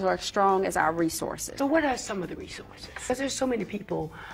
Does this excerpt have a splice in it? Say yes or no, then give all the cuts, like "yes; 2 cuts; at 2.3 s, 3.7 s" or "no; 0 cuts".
yes; 2 cuts; at 1.4 s, 3.1 s